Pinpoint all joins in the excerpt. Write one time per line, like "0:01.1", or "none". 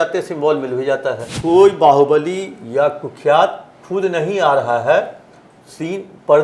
0:01.2